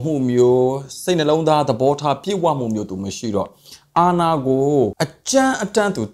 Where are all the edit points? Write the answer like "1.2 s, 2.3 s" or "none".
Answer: 5.1 s